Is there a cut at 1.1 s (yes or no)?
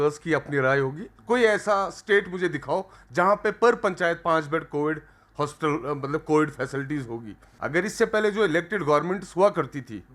yes